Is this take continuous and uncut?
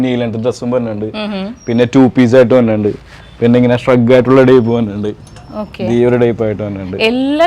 yes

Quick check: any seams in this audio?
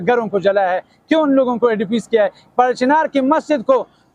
no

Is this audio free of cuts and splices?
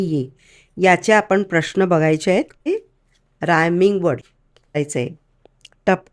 no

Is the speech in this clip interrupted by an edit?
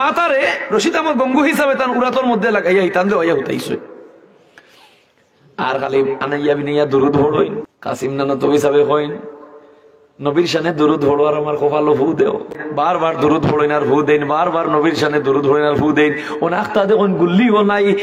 yes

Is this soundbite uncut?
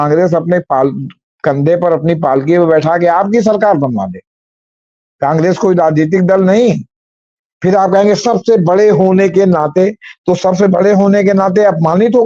yes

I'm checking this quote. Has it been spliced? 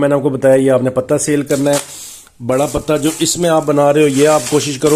no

